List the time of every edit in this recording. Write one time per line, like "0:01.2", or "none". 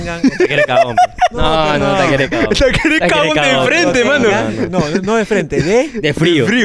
none

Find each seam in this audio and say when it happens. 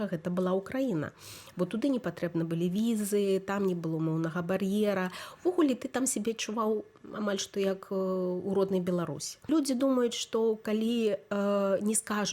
0:09.5

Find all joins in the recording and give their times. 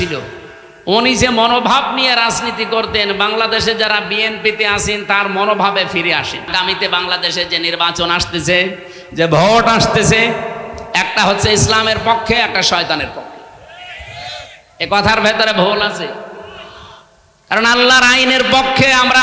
0:06.5

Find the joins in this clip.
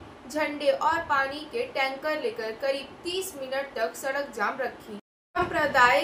0:05.1

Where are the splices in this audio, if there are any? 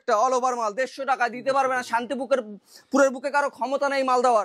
none

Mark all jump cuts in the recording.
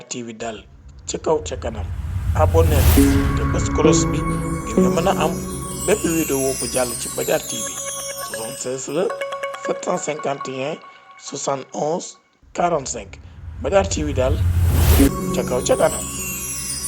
0:15.1

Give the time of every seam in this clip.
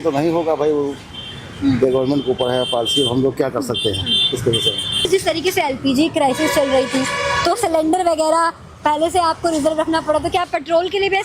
0:05.1

